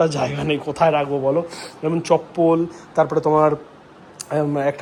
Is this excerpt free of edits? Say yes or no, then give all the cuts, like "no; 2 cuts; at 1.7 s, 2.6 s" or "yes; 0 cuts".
yes; 0 cuts